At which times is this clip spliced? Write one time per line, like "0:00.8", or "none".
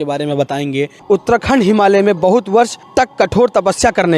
0:01.0
0:02.8